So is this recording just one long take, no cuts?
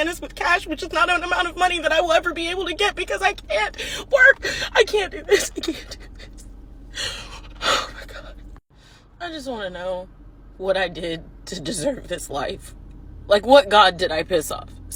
yes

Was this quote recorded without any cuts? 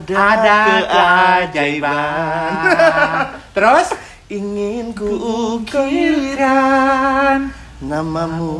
yes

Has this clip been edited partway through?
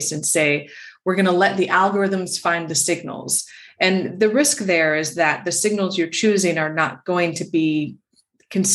no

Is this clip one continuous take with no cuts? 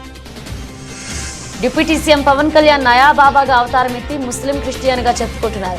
no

